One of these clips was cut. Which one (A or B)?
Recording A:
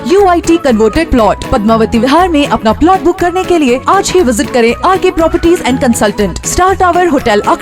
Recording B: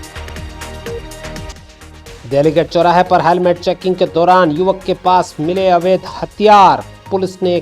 B